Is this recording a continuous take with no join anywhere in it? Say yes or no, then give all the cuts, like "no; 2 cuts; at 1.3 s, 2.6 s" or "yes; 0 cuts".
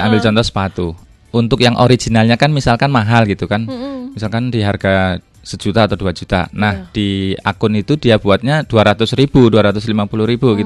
yes; 0 cuts